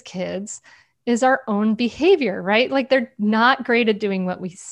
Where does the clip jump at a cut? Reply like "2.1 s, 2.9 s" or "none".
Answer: none